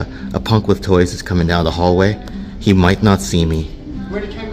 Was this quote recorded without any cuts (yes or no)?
yes